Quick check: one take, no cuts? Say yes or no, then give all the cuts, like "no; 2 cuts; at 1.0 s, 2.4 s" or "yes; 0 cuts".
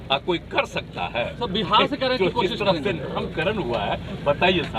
yes; 0 cuts